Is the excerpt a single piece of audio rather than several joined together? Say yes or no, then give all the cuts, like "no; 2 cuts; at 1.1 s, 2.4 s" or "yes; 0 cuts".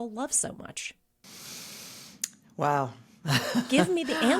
no; 1 cut; at 1.2 s